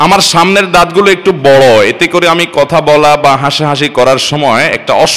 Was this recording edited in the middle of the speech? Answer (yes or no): no